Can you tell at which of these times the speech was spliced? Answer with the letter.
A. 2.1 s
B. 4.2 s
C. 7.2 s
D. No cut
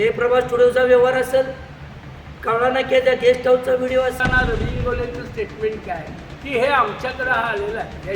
B